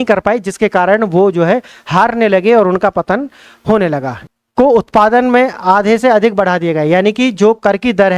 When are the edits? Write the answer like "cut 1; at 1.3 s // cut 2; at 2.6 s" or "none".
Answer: cut 1; at 4.1 s